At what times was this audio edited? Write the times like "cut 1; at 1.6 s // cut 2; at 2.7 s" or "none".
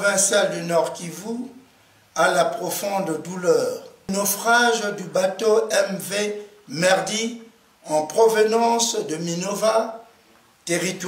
cut 1; at 4.1 s